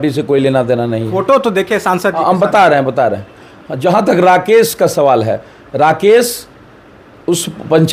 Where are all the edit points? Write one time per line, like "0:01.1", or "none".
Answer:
none